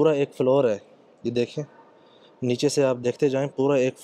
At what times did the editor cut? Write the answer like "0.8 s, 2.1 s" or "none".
none